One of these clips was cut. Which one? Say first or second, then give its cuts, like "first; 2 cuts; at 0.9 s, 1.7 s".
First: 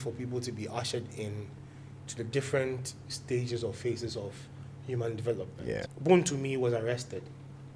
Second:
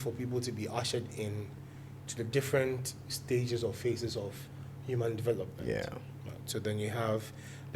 first; 1 cut; at 5.9 s